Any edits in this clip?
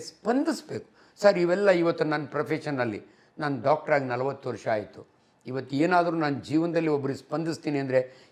no; 0 cuts

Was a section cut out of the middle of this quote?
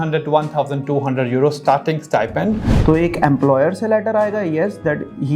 yes; 1 cut; at 2.7 s

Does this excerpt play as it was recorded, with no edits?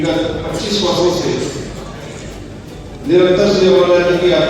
yes; 0 cuts

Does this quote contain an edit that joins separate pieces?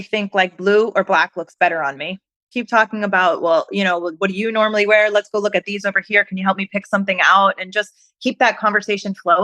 yes; 1 cut; at 2.5 s

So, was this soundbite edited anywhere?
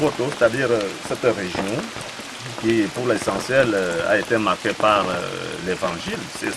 no; 0 cuts

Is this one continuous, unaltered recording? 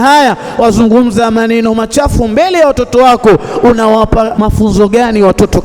no; 1 cut; at 4.3 s

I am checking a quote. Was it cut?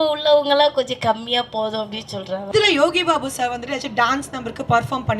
yes; 1 cut; at 2.5 s

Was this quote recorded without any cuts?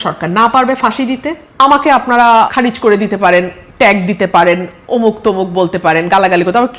no; 2 cuts; at 1.4 s, 2.5 s

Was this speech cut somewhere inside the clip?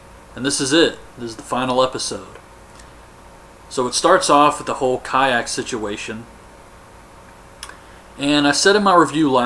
yes; 1 cut; at 7.0 s

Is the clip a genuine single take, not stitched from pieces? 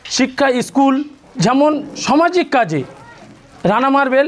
no; 2 cuts; at 1.2 s, 1.9 s

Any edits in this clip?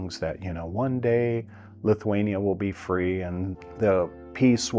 yes; 1 cut; at 3.6 s

